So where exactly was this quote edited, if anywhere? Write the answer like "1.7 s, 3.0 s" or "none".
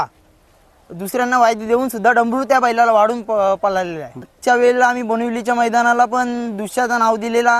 4.3 s